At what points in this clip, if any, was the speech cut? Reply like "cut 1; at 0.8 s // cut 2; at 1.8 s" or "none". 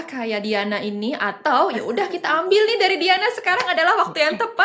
none